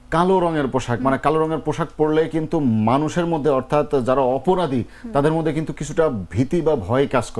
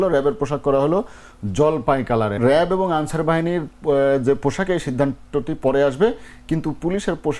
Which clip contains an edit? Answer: second; 1 cut; at 2.4 s

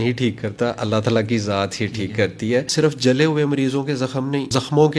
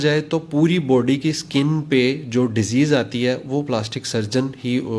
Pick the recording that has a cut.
first; 1 cut; at 2.7 s

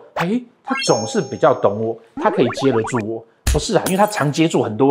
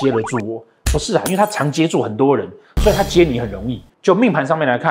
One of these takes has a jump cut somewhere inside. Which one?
second; 1 cut; at 3.9 s

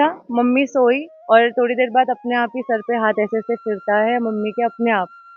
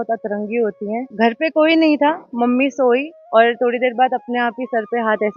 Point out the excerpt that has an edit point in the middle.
second; 1 cut; at 1.1 s

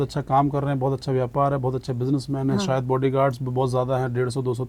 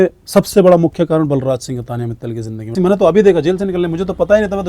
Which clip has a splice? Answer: second; 1 cut; at 2.7 s

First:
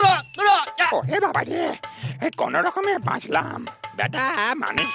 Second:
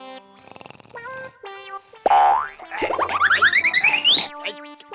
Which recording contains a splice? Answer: first; 1 cut; at 0.9 s

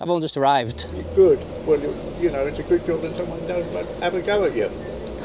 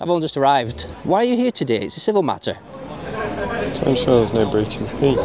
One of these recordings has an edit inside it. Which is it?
second; 1 cut; at 0.9 s

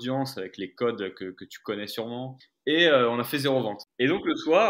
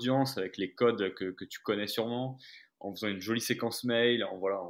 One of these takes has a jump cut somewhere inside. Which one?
first; 2 cuts; at 2.4 s, 3.8 s

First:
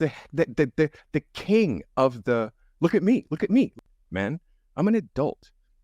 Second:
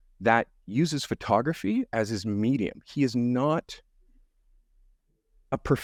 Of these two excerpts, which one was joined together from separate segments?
first; 1 cut; at 3.9 s

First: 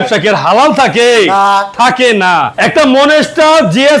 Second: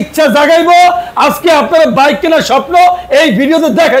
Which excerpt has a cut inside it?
first; 1 cut; at 2.5 s

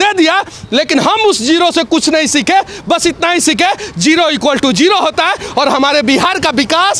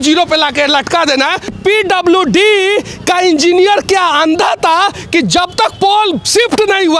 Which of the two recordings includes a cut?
second; 1 cut; at 1.5 s

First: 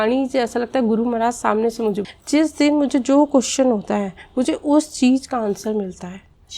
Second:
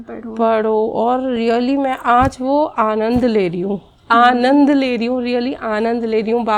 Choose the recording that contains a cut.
first; 1 cut; at 2.0 s

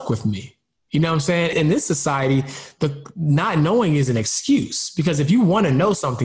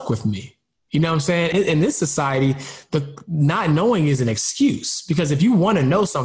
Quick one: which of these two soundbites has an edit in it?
first; 1 cut; at 1.5 s

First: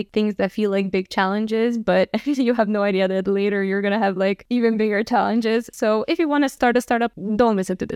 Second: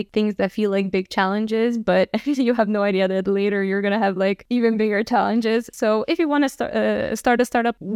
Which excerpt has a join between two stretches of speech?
first; 1 cut; at 6.5 s

